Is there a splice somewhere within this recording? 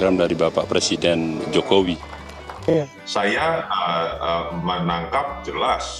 yes; 1 cut; at 2.5 s

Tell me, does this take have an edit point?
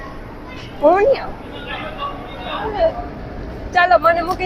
yes; 1 cut; at 2.6 s

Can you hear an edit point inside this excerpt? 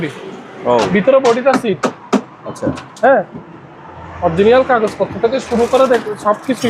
no; 0 cuts

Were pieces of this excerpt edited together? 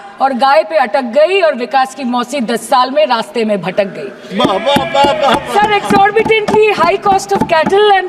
no; 0 cuts

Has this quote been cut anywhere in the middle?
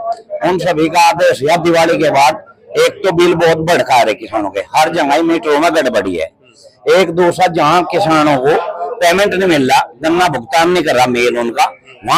no; 0 cuts

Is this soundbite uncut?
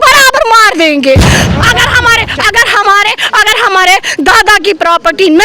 no; 1 cut; at 1.3 s

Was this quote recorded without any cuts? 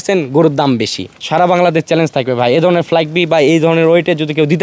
no; 1 cut; at 1.2 s

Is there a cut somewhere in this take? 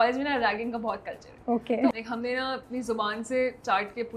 yes; 1 cut; at 1.9 s

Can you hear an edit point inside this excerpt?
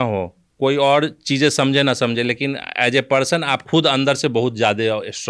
no; 0 cuts

